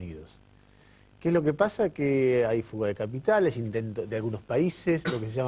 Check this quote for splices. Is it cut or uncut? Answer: uncut